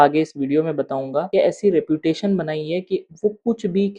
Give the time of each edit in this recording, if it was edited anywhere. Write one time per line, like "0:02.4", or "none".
none